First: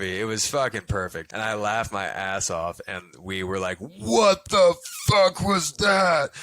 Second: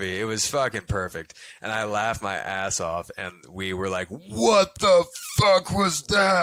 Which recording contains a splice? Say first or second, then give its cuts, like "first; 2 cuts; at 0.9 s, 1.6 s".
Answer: first; 1 cut; at 1.2 s